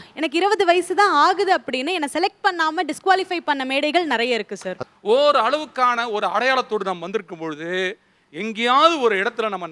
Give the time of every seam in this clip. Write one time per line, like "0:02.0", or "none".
0:04.8